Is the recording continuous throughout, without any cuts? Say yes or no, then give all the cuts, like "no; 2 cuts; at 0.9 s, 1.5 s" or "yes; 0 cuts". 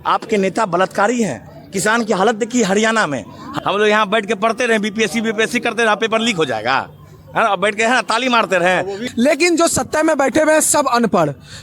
no; 2 cuts; at 3.4 s, 9.0 s